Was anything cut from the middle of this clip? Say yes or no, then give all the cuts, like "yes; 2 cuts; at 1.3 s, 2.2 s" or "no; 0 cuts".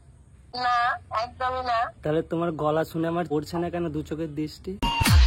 no; 0 cuts